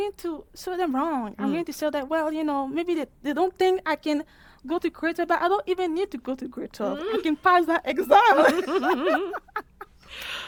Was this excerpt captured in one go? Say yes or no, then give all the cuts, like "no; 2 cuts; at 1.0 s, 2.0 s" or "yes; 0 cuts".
yes; 0 cuts